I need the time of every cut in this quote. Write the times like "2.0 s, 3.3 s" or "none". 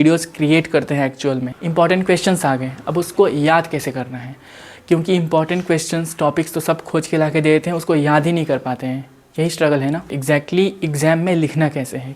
1.5 s, 10.1 s